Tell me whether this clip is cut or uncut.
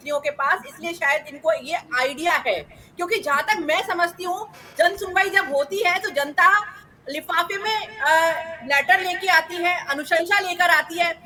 uncut